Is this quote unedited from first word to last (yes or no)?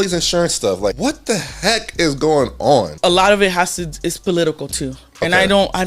no